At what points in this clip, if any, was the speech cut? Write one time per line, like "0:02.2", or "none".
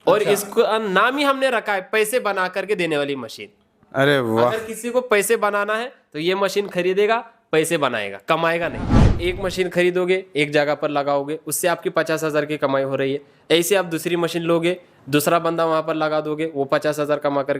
0:09.2